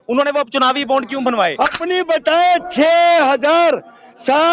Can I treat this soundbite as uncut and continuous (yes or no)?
no